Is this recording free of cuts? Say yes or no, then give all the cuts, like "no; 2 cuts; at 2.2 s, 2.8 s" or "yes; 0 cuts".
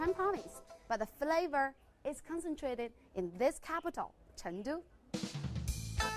no; 1 cut; at 0.9 s